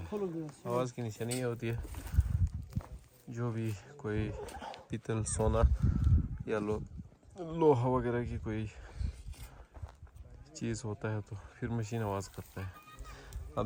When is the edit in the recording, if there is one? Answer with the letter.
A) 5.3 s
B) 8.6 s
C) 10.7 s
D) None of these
D